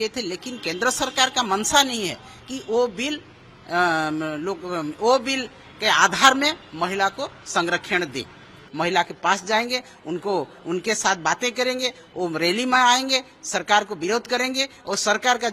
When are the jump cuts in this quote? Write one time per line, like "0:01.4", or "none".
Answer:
0:08.6